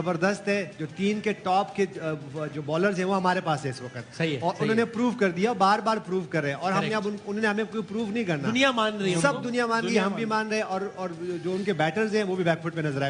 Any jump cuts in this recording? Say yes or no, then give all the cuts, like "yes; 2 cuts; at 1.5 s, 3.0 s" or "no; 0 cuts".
no; 0 cuts